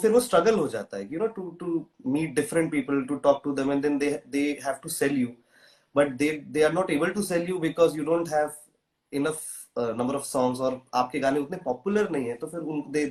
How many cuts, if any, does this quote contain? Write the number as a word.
zero